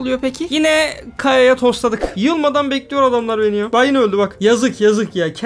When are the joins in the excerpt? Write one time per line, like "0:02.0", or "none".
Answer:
0:02.1